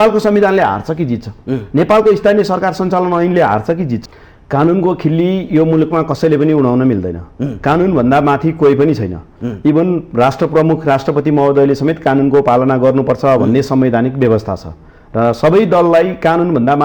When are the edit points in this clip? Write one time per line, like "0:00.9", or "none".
0:04.0